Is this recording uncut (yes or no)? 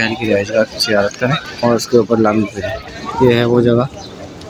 no